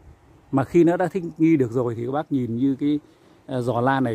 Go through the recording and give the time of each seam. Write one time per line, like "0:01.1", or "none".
none